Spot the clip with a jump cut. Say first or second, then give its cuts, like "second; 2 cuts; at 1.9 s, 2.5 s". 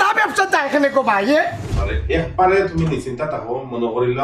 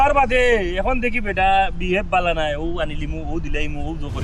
first; 1 cut; at 1.8 s